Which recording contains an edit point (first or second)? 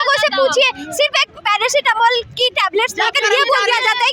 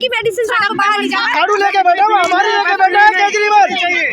second